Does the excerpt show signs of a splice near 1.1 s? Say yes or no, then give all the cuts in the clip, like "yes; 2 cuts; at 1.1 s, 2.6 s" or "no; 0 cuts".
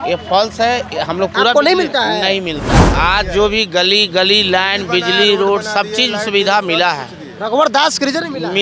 no; 1 cut; at 2.9 s